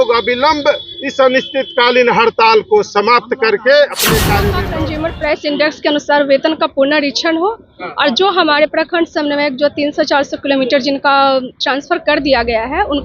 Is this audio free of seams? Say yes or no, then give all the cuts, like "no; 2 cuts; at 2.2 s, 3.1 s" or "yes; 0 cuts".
no; 1 cut; at 4.6 s